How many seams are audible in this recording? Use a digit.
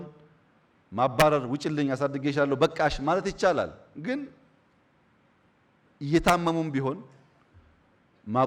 0